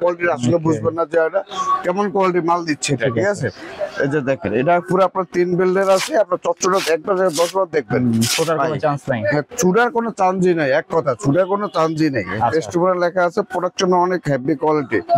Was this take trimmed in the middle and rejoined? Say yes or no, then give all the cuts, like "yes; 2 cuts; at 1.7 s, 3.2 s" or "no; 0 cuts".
no; 0 cuts